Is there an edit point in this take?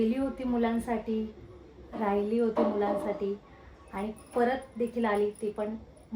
no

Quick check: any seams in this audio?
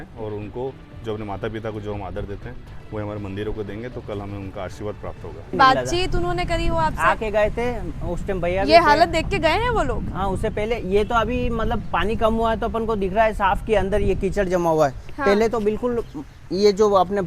yes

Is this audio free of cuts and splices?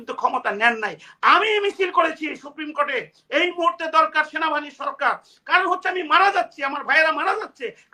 yes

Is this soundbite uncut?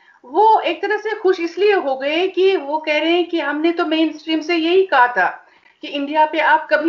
yes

